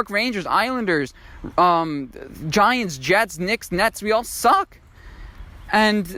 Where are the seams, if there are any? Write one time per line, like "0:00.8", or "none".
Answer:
none

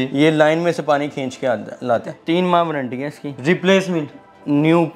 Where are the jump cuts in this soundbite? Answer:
0:02.1

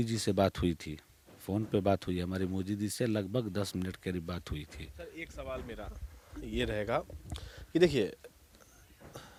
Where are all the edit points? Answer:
none

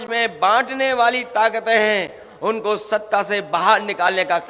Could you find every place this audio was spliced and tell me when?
none

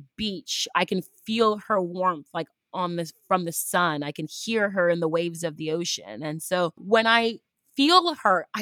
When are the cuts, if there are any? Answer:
0:06.8

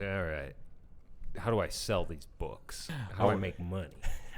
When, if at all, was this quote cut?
0:02.9

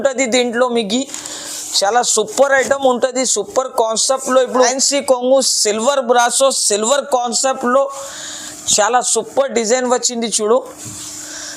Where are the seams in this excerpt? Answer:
0:04.5

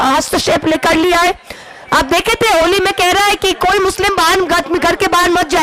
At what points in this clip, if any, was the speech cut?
0:01.6

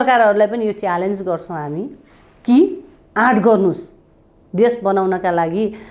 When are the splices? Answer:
none

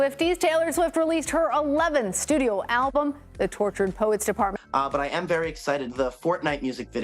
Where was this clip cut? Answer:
0:04.6

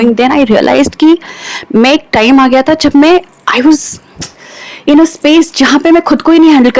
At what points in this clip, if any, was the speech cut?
none

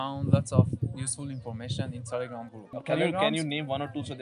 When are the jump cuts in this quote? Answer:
0:02.7

